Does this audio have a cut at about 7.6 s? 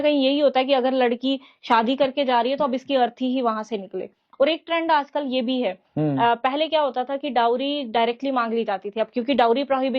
no; 1 cut; at 4.2 s

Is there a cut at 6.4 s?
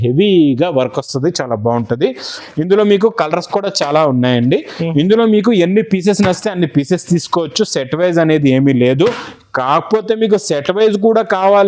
no; 0 cuts

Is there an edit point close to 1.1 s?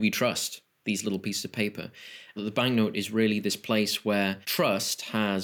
no; 2 cuts; at 2.4 s, 4.4 s

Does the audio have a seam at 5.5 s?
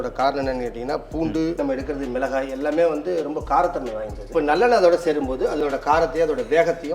no; 2 cuts; at 1.6 s, 4.3 s

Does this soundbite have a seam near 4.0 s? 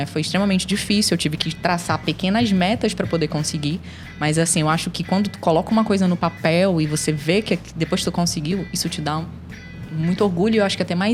no; 0 cuts

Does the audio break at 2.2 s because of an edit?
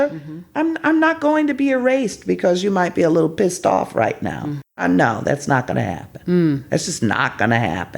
no; 1 cut; at 4.8 s

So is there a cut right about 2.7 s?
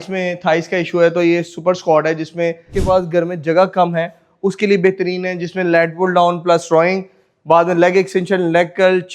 yes; 1 cut; at 2.7 s

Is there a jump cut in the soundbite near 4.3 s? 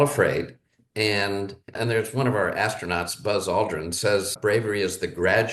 no; 1 cut; at 1.7 s

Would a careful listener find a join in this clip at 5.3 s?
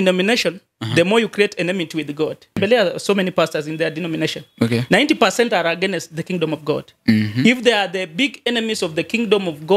no; 1 cut; at 2.6 s

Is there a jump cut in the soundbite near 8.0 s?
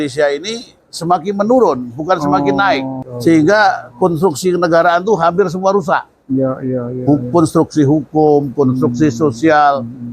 no; 1 cut; at 3.0 s

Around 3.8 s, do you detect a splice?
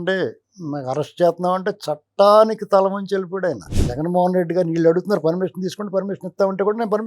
yes; 1 cut; at 3.8 s

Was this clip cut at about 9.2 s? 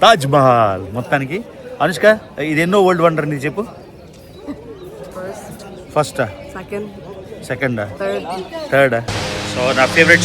yes; 1 cut; at 9.2 s

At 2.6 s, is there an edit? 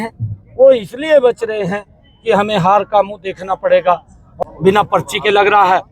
no; 1 cut; at 4.3 s

